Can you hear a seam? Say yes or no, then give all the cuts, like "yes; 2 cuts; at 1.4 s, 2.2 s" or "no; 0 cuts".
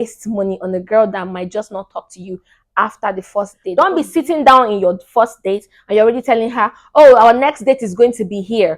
yes; 1 cut; at 3.7 s